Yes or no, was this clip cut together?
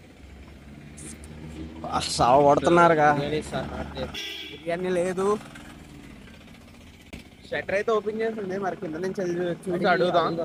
no